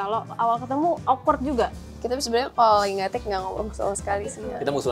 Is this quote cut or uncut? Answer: cut